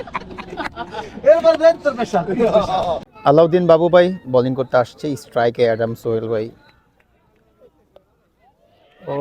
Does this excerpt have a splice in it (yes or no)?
yes